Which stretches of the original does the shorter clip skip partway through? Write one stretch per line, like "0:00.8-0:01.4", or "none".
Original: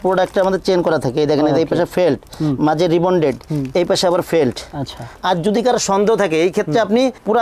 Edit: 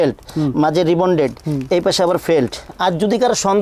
0:04.7-0:05.1